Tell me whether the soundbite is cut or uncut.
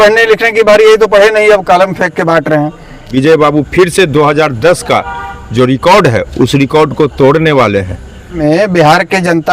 cut